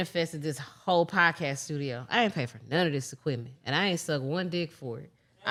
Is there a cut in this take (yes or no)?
no